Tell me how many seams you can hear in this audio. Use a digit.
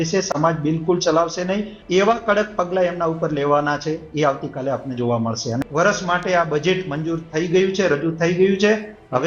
2